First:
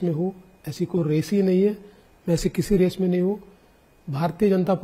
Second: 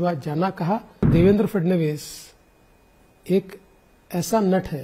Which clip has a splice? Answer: second; 1 cut; at 1.1 s

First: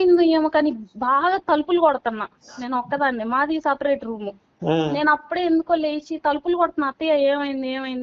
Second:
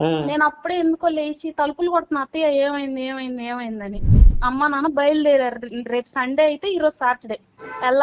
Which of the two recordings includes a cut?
second; 1 cut; at 4.3 s

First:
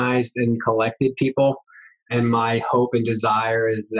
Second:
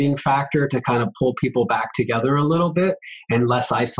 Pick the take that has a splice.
first; 1 cut; at 2.1 s

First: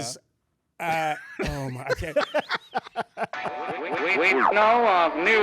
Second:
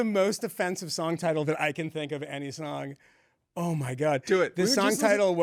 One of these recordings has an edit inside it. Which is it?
first; 1 cut; at 3.4 s

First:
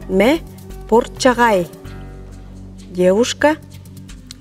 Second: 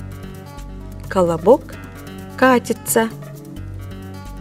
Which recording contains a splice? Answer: second; 1 cut; at 3.2 s

